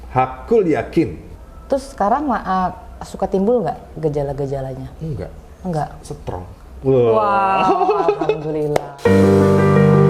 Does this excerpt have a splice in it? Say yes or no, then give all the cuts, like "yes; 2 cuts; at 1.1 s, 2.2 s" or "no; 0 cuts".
yes; 2 cuts; at 1.3 s, 9.0 s